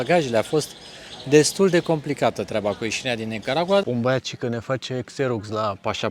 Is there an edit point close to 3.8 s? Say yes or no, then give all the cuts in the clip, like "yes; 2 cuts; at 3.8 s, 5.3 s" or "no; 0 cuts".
yes; 1 cut; at 3.8 s